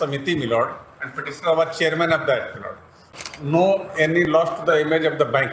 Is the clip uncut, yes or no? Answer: no